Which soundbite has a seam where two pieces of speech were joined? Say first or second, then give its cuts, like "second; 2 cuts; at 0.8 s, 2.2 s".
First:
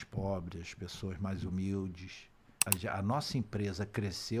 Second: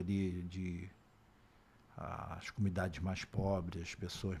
first; 1 cut; at 2.5 s